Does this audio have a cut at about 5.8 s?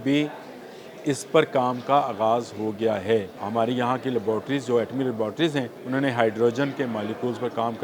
yes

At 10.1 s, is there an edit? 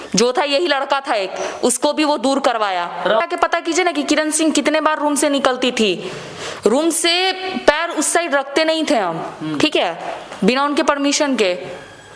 no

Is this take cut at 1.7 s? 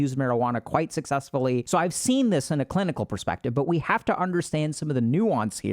yes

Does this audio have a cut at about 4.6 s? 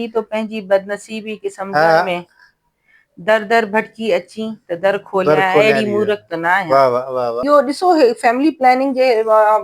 no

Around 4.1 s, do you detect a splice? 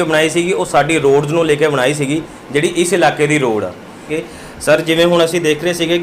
yes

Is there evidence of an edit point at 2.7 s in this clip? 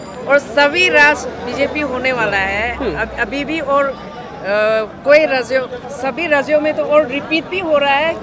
no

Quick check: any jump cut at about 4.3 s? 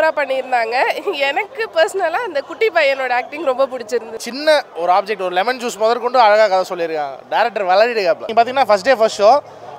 yes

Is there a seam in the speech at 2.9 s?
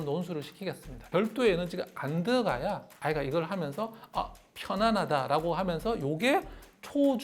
yes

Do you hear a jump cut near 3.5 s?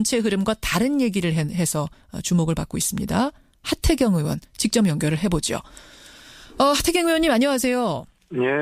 yes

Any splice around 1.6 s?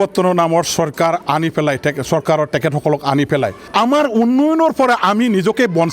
no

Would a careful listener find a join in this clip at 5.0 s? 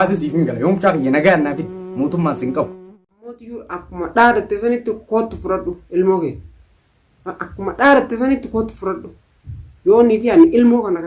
no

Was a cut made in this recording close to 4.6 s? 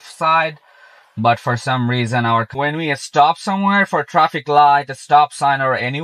no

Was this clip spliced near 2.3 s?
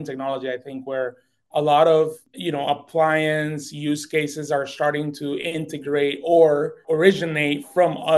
yes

